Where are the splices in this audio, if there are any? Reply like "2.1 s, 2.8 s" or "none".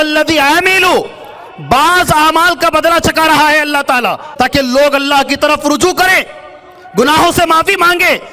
4.2 s

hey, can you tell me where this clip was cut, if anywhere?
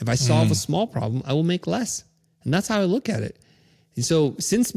none

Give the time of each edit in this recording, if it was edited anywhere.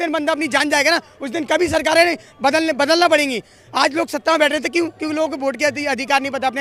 none

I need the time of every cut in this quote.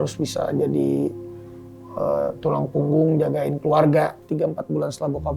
4.2 s

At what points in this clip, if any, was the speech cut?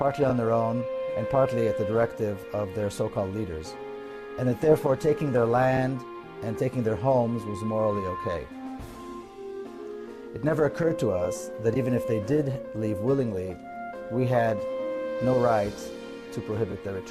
none

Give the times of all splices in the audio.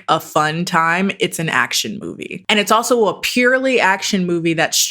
2.3 s

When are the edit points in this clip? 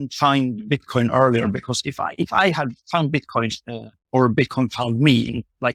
none

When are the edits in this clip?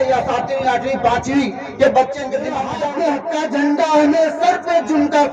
2.7 s

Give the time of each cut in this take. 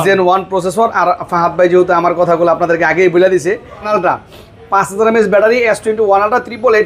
3.9 s

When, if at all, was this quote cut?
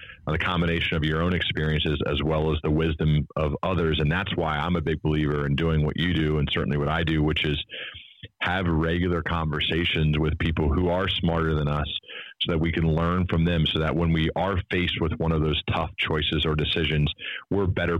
none

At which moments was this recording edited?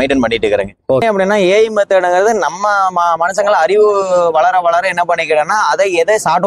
1.0 s

